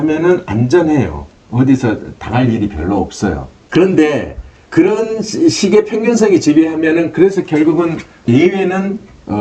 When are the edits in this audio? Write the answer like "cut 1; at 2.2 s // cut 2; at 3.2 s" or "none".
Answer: cut 1; at 3.5 s // cut 2; at 8.2 s